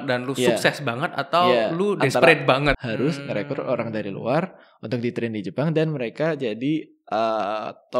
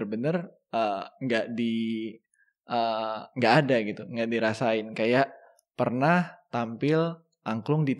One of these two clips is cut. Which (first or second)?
first